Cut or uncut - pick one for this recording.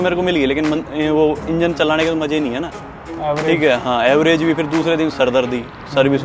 uncut